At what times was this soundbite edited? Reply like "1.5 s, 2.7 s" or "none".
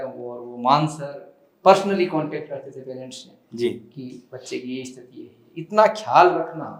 none